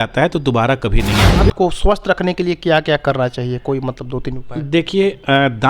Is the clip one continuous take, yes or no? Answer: no